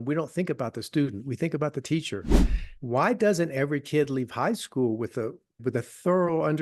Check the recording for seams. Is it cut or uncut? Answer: cut